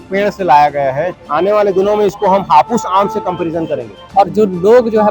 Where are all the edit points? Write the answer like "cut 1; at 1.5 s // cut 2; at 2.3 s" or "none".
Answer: cut 1; at 1.2 s // cut 2; at 4.0 s